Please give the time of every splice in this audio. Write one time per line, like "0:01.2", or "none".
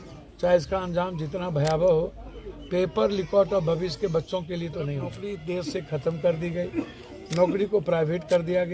0:05.3